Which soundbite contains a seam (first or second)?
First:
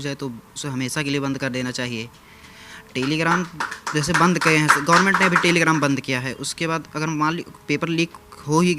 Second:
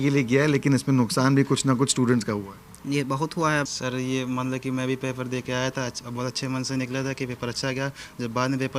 second